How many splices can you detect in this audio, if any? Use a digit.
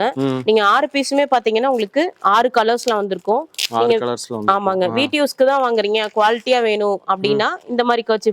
0